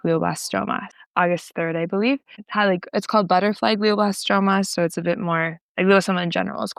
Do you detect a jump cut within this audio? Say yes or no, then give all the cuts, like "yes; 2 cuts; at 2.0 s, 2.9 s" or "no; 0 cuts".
no; 0 cuts